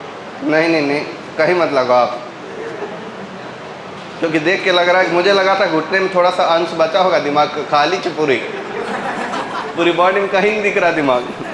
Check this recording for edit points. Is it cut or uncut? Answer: uncut